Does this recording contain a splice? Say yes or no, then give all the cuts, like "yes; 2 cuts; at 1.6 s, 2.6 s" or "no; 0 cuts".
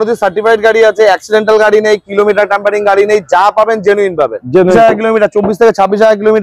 yes; 1 cut; at 4.7 s